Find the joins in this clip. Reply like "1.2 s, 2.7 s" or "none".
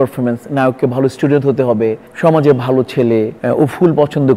2.1 s, 3.4 s